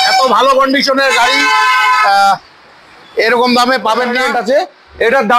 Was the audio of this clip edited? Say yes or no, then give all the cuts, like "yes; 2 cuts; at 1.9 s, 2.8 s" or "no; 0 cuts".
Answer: yes; 1 cut; at 4.2 s